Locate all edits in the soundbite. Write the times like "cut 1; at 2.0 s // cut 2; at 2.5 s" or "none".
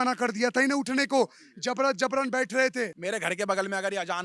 cut 1; at 3.0 s